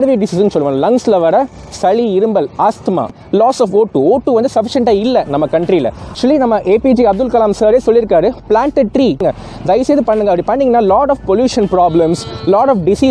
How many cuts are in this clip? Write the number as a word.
three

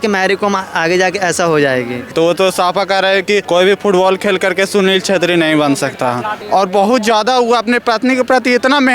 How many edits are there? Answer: three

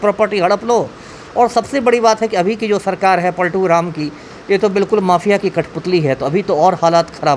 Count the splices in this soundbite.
zero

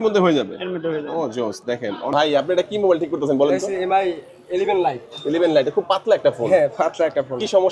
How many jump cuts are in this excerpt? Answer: one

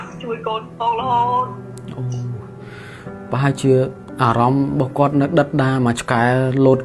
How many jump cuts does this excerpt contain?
zero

